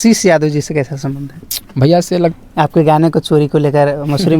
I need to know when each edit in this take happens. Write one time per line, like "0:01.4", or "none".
0:02.3